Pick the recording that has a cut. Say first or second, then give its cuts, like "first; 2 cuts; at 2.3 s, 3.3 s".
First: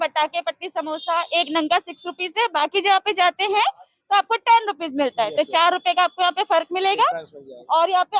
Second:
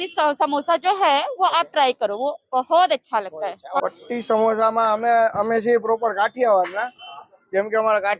second; 1 cut; at 3.8 s